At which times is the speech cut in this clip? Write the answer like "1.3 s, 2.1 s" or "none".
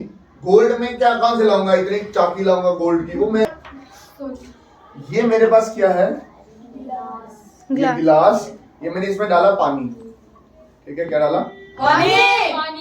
3.4 s